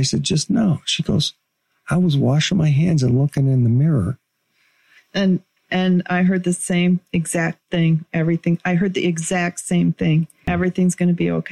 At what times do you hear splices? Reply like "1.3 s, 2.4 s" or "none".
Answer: 10.5 s